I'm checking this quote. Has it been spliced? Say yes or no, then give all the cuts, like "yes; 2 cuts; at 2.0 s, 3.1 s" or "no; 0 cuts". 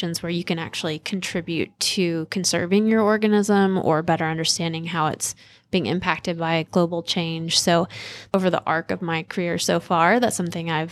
yes; 1 cut; at 8.2 s